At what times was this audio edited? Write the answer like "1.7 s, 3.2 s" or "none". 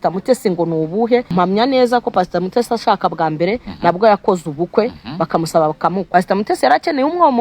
1.3 s, 6.0 s